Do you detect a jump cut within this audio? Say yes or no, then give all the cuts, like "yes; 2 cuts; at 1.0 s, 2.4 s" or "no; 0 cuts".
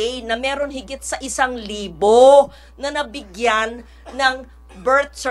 no; 0 cuts